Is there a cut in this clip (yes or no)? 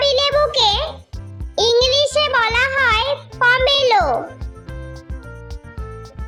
no